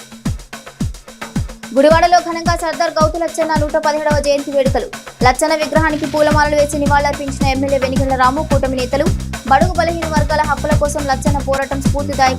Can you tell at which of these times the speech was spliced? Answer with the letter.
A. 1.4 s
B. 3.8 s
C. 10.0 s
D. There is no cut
A